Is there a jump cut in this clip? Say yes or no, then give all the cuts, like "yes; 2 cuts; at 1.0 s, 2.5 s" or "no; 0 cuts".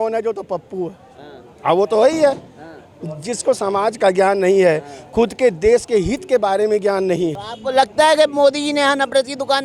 yes; 1 cut; at 7.5 s